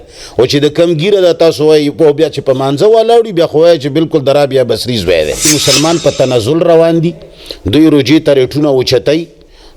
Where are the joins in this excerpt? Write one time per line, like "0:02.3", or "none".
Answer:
0:05.4